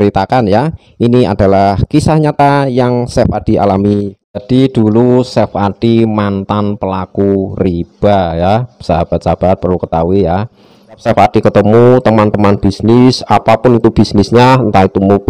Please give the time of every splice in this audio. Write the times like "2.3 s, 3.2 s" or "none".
4.2 s, 11.0 s